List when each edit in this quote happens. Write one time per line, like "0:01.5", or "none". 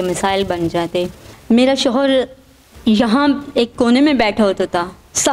0:01.3